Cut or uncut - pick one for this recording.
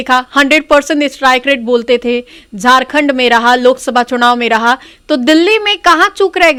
uncut